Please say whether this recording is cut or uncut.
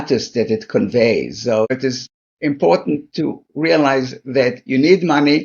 cut